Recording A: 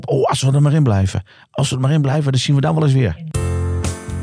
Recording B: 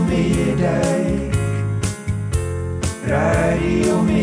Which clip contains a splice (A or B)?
A